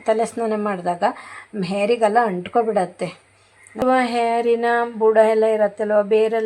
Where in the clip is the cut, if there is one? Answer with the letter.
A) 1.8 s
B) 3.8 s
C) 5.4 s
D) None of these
B